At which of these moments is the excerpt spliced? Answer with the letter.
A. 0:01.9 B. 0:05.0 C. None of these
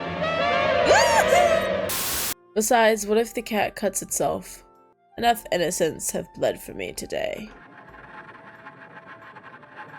A